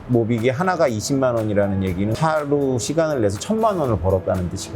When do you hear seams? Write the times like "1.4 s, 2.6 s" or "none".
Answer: 2.2 s